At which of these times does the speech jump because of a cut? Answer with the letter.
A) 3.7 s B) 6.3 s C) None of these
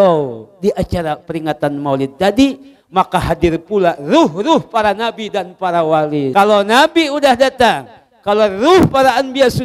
B